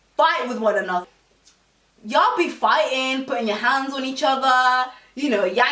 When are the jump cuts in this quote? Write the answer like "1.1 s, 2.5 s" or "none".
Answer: 1.1 s